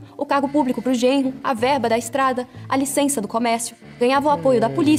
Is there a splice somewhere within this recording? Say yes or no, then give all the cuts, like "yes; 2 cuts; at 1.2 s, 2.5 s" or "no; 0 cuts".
no; 0 cuts